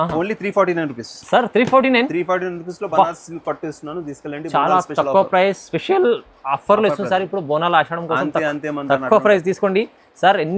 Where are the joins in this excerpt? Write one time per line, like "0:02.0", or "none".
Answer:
none